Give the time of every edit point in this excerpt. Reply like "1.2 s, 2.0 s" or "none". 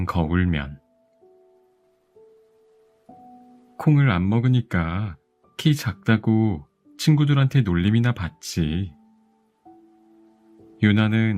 1.0 s, 3.7 s, 8.9 s, 10.4 s